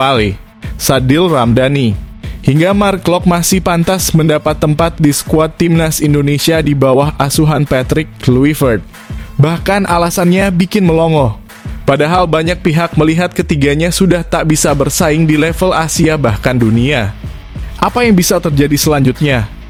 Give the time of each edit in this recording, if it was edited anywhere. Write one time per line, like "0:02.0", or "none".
none